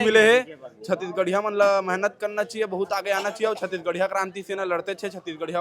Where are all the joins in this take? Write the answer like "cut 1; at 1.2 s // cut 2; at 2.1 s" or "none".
none